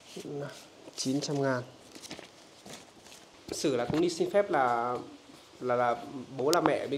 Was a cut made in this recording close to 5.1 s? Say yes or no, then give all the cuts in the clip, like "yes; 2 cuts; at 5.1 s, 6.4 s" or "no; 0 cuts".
no; 1 cut; at 3.3 s